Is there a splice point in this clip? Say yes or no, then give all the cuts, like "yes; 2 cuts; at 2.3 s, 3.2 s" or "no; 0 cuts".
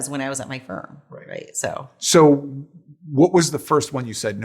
yes; 1 cut; at 2.0 s